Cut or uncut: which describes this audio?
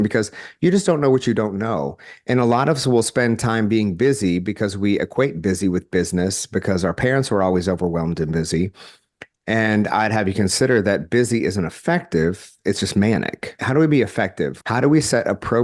cut